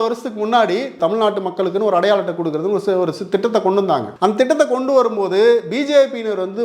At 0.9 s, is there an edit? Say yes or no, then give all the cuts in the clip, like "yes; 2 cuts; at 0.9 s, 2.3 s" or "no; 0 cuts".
yes; 2 cuts; at 0.9 s, 4.1 s